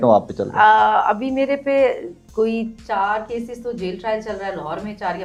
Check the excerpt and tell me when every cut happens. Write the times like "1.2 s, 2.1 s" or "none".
none